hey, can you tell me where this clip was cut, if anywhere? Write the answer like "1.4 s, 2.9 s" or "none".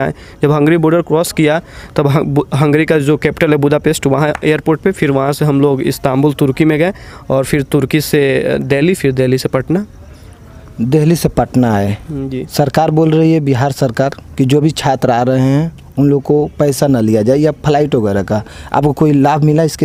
none